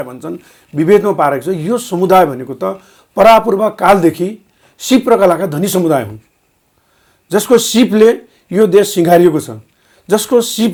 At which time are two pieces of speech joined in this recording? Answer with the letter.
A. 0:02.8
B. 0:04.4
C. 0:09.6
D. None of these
D